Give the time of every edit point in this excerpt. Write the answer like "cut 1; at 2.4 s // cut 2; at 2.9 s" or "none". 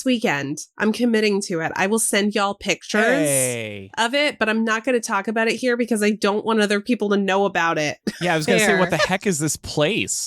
none